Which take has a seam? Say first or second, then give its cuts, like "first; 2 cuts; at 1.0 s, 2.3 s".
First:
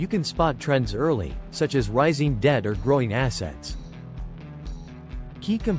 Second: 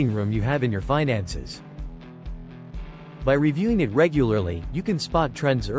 second; 2 cuts; at 1.5 s, 3.2 s